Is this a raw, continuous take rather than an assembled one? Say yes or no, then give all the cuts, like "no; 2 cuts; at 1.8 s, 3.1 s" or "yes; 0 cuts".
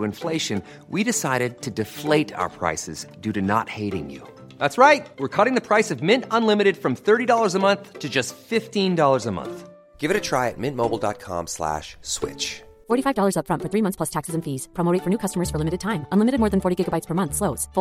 yes; 0 cuts